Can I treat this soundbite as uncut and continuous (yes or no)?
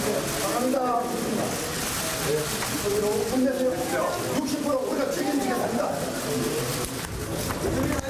yes